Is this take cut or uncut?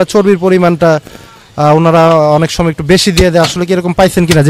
uncut